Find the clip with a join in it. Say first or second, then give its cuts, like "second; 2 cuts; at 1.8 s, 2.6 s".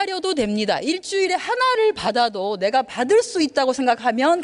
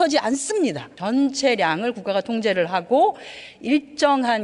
second; 1 cut; at 0.9 s